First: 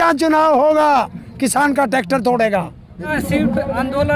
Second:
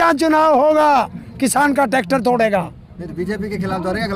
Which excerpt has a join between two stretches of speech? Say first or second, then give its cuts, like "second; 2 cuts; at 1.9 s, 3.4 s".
first; 1 cut; at 3.1 s